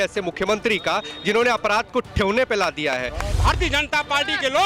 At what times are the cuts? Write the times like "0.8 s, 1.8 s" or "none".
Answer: 3.3 s